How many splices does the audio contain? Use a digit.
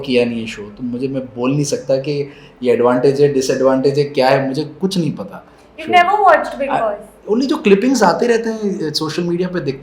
0